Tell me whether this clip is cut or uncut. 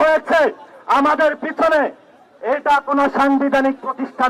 uncut